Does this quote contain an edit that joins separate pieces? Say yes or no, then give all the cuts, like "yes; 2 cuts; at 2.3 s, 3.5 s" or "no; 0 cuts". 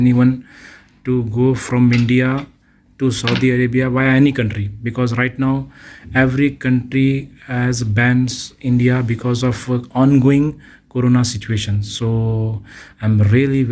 no; 0 cuts